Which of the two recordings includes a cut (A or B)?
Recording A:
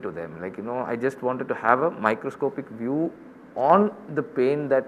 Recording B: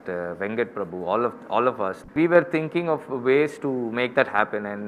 B